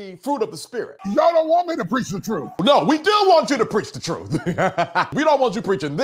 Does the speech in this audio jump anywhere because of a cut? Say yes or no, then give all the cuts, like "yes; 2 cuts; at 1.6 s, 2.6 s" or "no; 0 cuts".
yes; 3 cuts; at 0.9 s, 2.6 s, 5.1 s